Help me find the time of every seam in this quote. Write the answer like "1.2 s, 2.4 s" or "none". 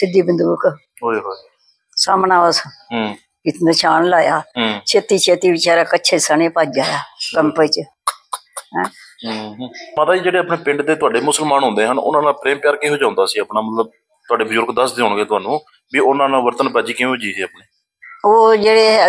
10.0 s